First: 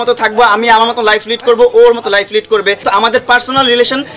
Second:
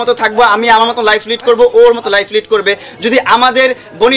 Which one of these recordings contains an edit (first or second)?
first